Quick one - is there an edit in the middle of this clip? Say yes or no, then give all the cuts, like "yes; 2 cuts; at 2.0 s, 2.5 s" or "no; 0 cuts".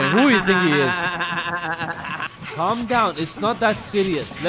yes; 1 cut; at 2.3 s